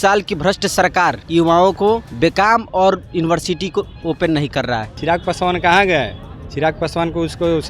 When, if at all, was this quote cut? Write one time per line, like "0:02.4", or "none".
0:01.2
0:02.1
0:04.9

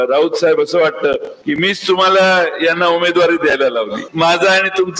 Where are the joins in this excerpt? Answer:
0:01.3
0:04.0

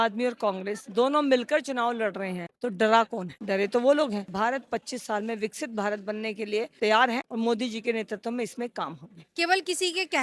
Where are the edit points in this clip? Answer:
0:04.3
0:07.3
0:09.3

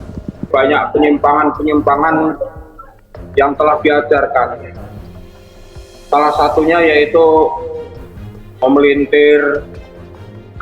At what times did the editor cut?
0:04.7
0:06.1

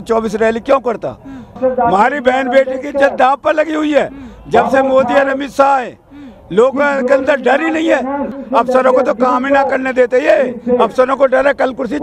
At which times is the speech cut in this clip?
0:01.5
0:08.3

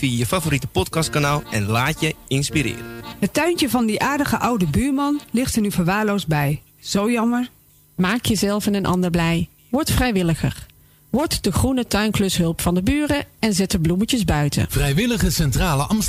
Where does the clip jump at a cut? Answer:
0:03.0
0:14.7

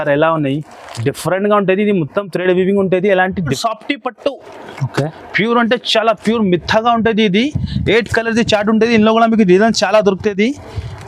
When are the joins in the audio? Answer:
0:03.6

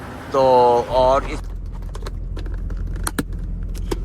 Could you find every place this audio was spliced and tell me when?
0:01.4

